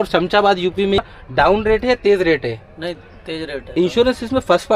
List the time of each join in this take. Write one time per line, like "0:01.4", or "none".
0:01.0
0:03.8